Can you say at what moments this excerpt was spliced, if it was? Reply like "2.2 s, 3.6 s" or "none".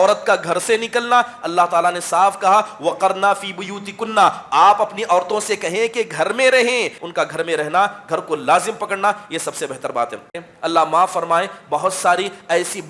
7.0 s, 10.3 s